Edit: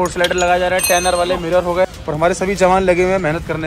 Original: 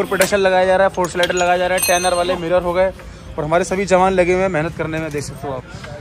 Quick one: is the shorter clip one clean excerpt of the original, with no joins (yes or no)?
no